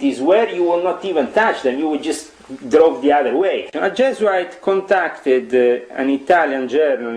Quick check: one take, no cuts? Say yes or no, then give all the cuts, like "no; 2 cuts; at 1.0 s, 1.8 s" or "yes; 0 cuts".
no; 1 cut; at 3.7 s